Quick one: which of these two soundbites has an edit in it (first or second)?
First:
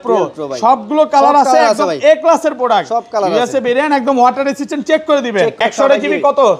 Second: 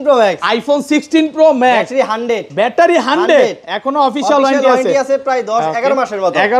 first